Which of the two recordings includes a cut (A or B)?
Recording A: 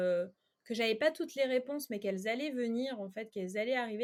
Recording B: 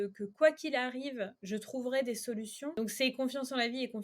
B